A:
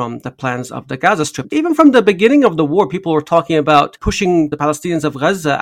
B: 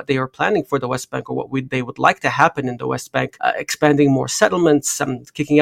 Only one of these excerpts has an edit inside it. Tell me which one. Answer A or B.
A